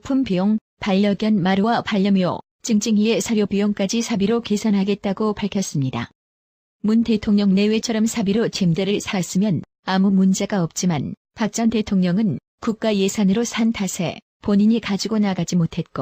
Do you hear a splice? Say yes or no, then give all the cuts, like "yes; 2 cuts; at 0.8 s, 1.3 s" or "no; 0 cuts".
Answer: no; 0 cuts